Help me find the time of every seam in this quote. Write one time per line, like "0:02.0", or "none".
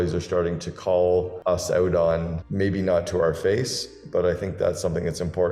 0:01.3